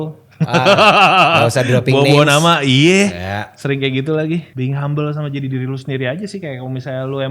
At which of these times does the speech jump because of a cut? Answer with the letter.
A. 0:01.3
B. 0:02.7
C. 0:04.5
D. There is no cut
C